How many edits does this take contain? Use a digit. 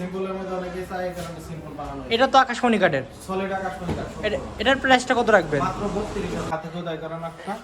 1